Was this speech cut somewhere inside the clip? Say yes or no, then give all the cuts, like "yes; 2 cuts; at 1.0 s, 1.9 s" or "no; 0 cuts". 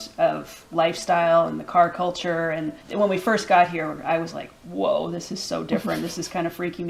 no; 0 cuts